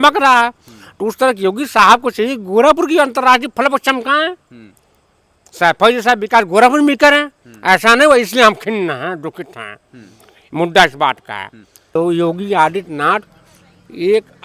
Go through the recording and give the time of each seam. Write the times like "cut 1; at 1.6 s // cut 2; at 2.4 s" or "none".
cut 1; at 11.9 s